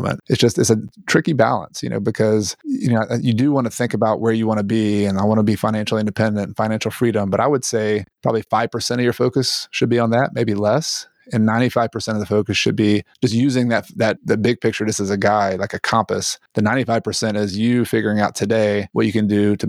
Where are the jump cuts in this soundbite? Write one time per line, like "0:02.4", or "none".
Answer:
none